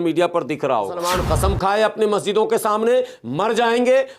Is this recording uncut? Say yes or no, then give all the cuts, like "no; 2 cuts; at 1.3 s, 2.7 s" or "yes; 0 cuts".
no; 1 cut; at 1.0 s